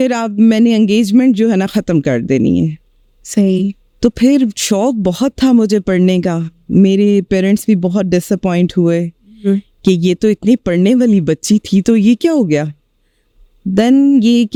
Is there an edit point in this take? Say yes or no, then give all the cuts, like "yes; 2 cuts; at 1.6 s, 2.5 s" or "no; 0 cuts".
no; 0 cuts